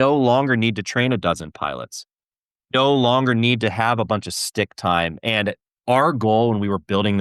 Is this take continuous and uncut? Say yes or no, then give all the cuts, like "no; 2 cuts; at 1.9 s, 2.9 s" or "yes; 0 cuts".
no; 1 cut; at 5.8 s